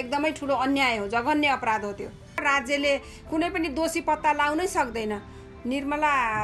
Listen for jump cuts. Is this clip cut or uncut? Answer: cut